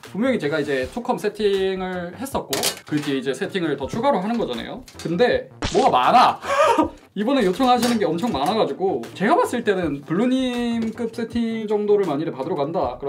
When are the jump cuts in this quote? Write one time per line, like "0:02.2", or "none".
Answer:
none